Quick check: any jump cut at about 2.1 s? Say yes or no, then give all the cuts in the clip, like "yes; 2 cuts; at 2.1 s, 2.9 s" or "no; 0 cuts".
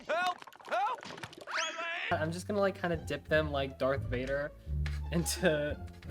yes; 1 cut; at 2.1 s